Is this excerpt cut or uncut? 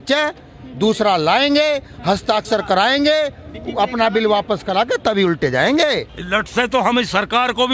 cut